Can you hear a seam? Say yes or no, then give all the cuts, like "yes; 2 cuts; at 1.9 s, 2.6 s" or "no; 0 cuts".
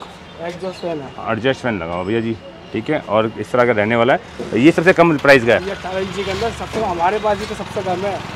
no; 0 cuts